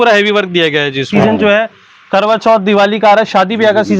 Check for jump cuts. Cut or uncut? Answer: cut